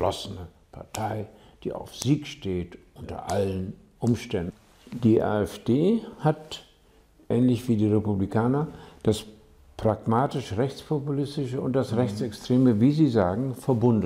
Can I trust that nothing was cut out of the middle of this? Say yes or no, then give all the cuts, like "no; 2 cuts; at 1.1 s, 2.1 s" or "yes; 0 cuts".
no; 1 cut; at 4.5 s